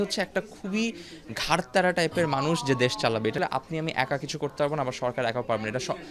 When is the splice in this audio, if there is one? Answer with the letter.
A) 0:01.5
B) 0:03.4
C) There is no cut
B